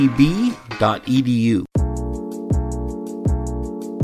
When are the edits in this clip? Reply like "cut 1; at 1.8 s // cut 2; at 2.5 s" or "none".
cut 1; at 1.7 s